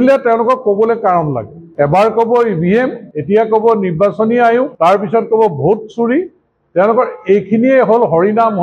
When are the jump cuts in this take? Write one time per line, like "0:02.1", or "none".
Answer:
none